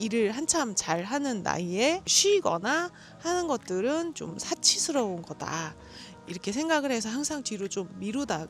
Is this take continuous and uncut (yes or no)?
yes